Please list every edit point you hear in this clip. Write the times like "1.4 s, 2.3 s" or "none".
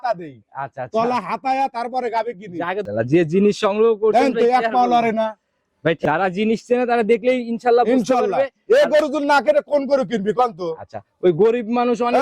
2.8 s, 6.0 s

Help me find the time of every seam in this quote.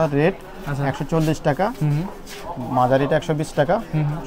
none

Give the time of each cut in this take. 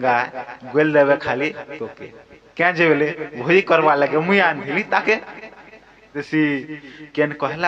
6.2 s

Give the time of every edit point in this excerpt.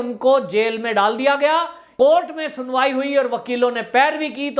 1.9 s

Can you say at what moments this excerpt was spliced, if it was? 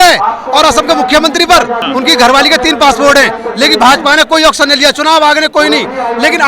1.8 s

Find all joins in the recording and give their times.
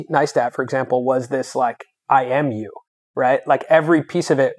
none

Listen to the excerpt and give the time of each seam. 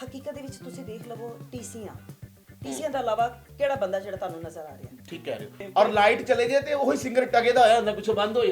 5.6 s

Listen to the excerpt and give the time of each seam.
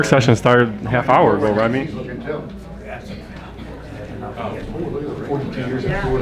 none

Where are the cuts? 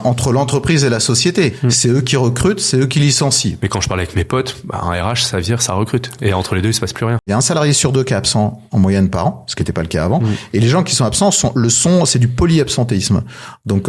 3.6 s, 7.3 s

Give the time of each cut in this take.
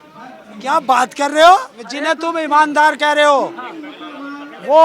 1.8 s

